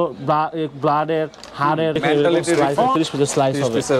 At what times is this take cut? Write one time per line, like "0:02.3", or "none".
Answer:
0:02.9